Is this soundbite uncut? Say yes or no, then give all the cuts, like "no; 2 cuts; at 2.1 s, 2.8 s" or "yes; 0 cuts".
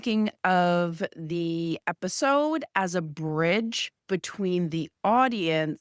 no; 1 cut; at 3.9 s